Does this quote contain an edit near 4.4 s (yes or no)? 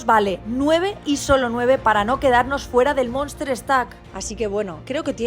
yes